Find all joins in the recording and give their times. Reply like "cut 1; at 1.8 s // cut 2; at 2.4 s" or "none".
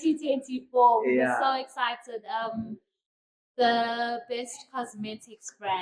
none